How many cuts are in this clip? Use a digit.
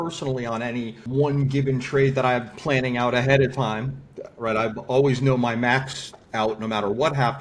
1